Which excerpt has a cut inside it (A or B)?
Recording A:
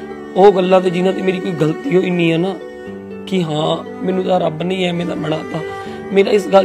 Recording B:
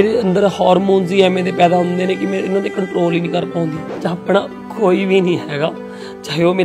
B